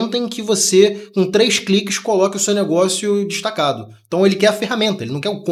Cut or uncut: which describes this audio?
uncut